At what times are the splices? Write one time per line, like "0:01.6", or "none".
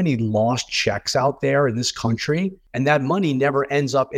0:02.6